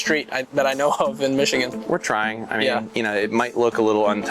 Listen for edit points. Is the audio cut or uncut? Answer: cut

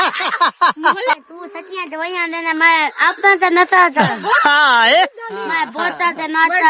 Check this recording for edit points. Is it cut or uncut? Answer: cut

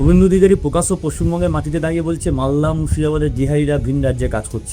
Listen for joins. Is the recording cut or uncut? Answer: uncut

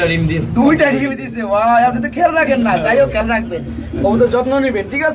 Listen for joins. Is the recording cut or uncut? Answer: uncut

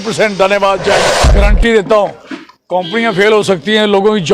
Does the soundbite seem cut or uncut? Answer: cut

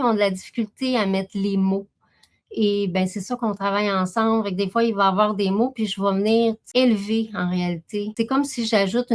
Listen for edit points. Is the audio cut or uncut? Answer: cut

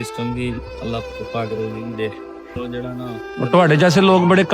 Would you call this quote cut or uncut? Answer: cut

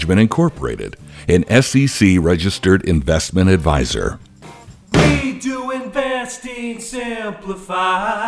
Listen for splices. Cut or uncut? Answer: cut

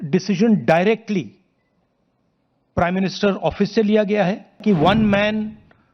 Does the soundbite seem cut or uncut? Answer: cut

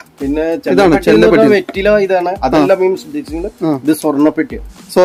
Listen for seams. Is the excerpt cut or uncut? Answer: uncut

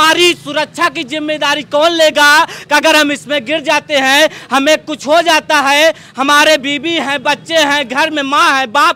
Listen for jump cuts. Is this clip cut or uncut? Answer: uncut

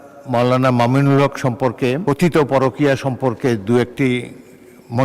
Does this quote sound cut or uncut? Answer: cut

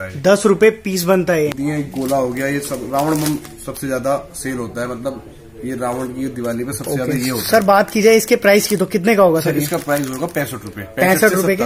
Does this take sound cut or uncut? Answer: cut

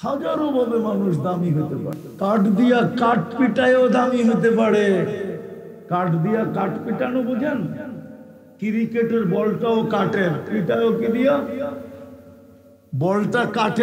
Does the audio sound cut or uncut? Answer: cut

